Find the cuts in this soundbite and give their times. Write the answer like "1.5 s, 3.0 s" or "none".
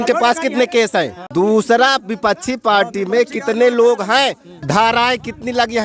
1.2 s, 4.5 s